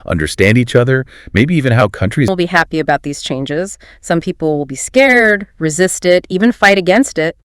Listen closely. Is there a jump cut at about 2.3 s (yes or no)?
yes